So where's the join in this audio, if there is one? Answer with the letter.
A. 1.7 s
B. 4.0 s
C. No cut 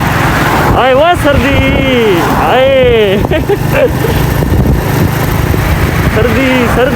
C